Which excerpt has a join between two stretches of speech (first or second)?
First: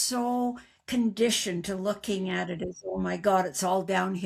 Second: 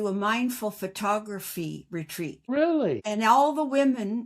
second